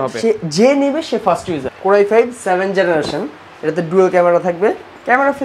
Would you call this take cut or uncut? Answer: cut